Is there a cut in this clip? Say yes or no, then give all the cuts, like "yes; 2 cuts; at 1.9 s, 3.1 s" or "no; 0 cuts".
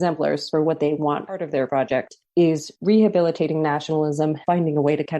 yes; 2 cuts; at 1.5 s, 4.4 s